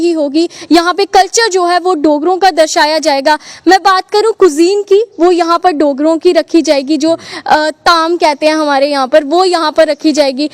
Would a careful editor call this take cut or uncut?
uncut